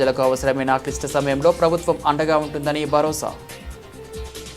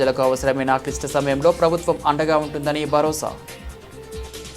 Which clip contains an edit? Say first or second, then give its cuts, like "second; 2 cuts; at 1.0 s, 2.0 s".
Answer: second; 1 cut; at 3.4 s